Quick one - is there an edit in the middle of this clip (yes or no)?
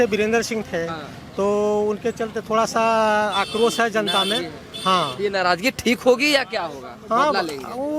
no